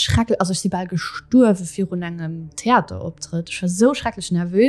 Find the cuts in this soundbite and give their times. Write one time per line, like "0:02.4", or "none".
none